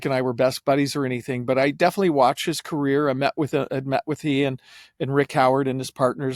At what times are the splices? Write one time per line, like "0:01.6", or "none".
none